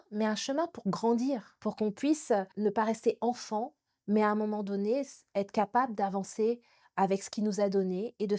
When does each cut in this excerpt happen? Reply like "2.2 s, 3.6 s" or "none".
none